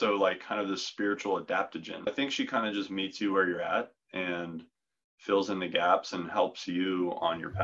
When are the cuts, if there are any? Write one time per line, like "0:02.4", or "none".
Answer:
0:02.1